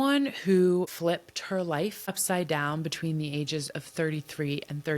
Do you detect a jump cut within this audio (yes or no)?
yes